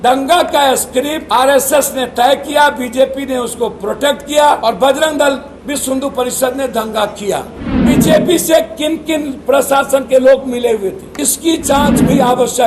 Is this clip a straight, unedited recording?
no; 5 cuts; at 1.2 s, 4.6 s, 5.5 s, 7.7 s, 11.1 s

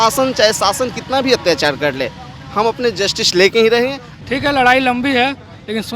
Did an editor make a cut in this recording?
yes; 1 cut; at 4.1 s

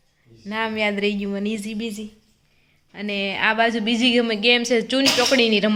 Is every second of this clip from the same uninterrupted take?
yes; 0 cuts

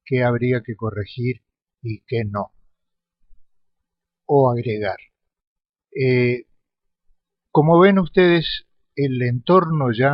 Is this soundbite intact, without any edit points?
yes; 0 cuts

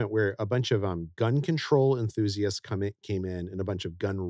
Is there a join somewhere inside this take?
no; 0 cuts

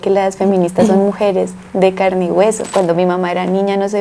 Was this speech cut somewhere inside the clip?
yes; 1 cut; at 2.7 s

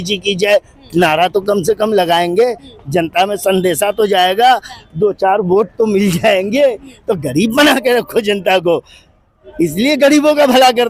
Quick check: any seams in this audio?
no; 0 cuts

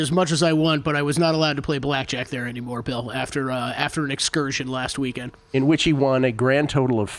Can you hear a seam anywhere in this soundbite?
no; 0 cuts

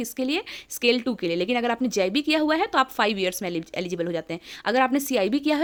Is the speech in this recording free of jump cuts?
yes; 0 cuts

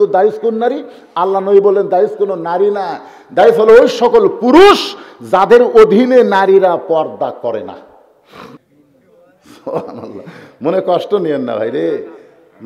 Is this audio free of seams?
no; 1 cut; at 8.6 s

